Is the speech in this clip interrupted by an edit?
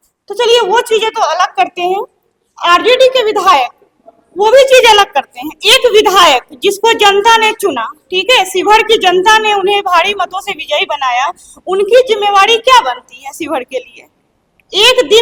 no; 0 cuts

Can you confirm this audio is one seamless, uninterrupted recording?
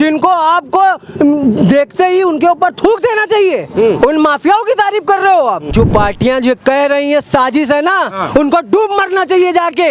no; 1 cut; at 5.7 s

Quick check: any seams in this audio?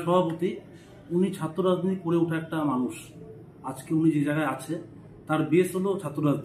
no; 0 cuts

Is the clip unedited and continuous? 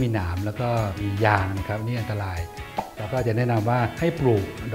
yes; 0 cuts

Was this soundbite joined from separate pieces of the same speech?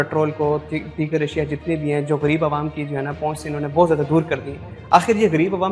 no; 0 cuts

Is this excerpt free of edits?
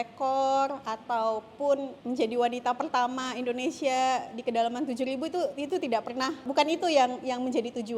no; 2 cuts; at 1.9 s, 6.5 s

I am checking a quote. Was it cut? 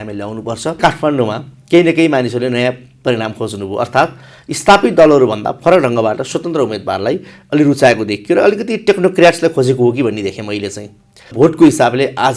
yes; 2 cuts; at 0.8 s, 11.3 s

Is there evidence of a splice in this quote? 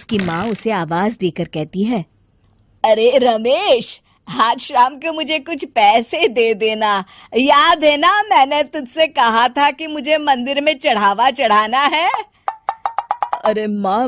no; 0 cuts

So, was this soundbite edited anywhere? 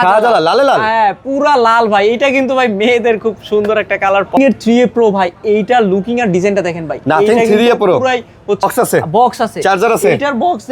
yes; 2 cuts; at 4.4 s, 8.6 s

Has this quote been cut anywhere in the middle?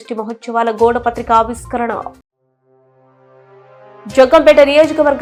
no; 0 cuts

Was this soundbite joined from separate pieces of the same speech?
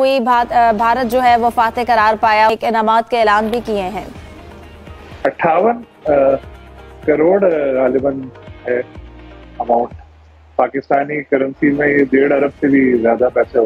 yes; 1 cut; at 2.5 s

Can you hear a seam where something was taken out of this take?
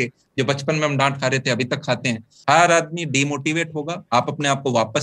yes; 1 cut; at 2.3 s

